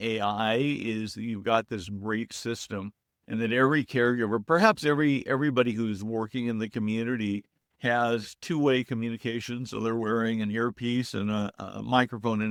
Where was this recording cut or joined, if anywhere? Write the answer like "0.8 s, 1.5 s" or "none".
none